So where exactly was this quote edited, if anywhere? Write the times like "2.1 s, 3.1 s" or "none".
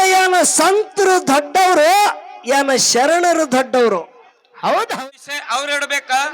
5.0 s